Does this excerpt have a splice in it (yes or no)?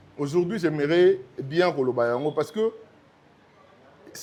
no